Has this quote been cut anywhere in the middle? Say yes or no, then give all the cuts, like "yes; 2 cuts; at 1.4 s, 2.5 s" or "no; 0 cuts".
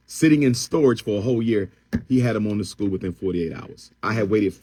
no; 0 cuts